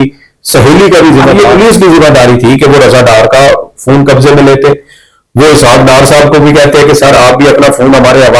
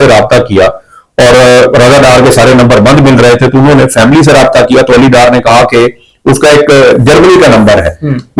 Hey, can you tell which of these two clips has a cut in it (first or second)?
first